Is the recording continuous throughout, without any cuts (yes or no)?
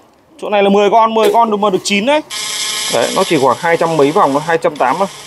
no